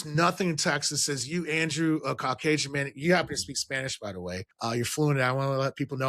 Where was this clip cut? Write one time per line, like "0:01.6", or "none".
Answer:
0:04.5

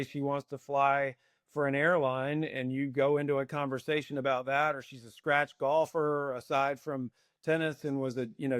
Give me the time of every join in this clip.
none

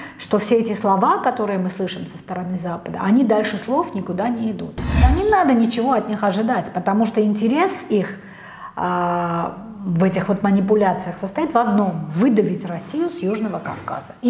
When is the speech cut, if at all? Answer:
0:04.9

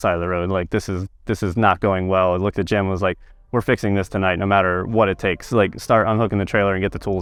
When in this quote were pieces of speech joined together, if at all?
none

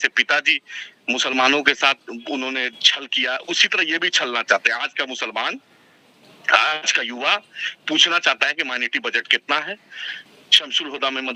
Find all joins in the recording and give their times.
none

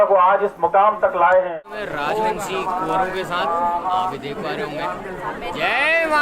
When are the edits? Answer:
0:01.8

